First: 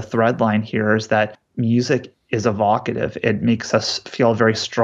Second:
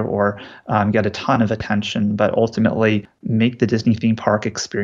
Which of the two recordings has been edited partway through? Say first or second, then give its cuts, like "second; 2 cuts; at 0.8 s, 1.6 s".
second; 1 cut; at 3.1 s